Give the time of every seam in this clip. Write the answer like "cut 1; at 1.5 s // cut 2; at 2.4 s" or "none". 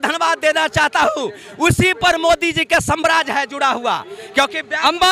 none